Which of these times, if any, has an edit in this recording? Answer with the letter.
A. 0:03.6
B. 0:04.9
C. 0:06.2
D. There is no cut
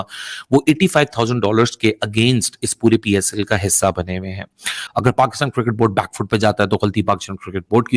D